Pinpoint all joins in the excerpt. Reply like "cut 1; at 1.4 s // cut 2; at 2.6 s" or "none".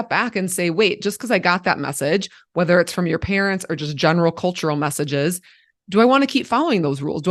none